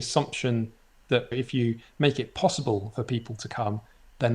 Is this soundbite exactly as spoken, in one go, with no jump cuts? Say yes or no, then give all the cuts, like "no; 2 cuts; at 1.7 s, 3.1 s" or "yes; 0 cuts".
no; 1 cut; at 1.3 s